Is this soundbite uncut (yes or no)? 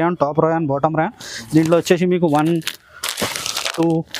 yes